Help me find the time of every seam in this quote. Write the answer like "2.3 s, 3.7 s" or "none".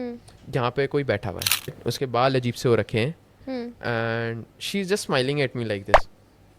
1.8 s